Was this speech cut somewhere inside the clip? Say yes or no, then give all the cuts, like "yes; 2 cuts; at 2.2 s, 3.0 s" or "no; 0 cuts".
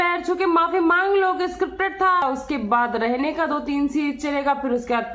yes; 1 cut; at 2.2 s